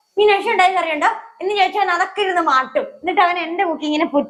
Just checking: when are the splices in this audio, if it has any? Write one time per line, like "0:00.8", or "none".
none